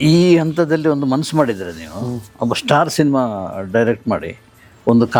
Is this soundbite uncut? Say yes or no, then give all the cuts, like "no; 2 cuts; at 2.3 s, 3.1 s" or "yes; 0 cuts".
yes; 0 cuts